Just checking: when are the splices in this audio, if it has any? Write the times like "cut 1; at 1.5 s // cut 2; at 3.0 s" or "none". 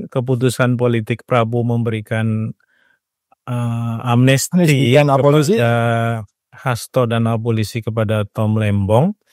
none